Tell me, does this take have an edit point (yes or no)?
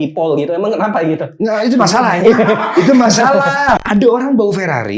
yes